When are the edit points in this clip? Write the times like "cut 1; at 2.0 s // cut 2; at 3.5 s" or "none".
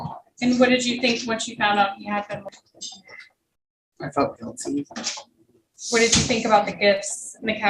cut 1; at 2.5 s